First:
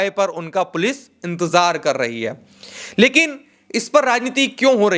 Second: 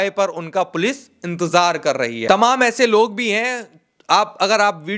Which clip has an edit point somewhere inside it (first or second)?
second